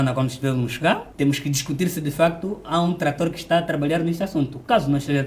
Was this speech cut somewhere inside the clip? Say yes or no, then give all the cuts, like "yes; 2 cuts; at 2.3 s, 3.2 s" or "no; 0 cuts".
yes; 1 cut; at 1.1 s